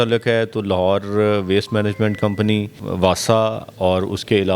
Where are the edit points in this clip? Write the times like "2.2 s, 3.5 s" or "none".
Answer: 2.8 s